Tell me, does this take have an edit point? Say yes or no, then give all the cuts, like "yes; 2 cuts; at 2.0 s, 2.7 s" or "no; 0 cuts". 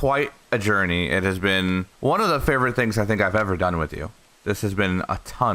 yes; 1 cut; at 1.9 s